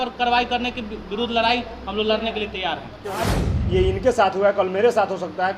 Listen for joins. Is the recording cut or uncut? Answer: cut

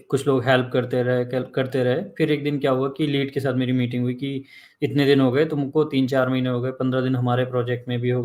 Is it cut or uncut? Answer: uncut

